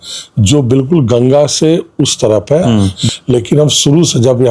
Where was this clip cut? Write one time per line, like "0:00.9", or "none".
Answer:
0:03.0

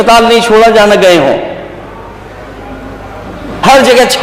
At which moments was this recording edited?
none

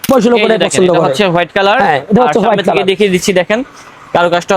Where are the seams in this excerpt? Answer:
none

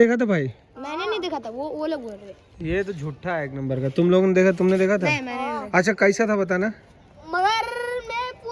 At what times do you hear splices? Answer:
none

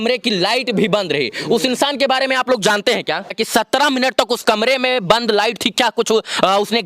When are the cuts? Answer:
0:03.4

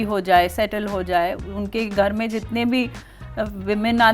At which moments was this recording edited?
0:01.4

